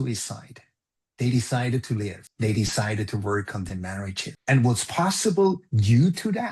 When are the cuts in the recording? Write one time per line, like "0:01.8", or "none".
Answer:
0:02.2
0:04.3